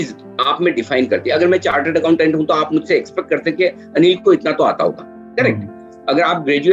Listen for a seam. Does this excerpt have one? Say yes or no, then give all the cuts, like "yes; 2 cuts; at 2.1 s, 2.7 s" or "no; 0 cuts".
no; 0 cuts